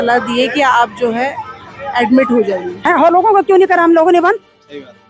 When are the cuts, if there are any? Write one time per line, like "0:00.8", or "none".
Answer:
0:02.7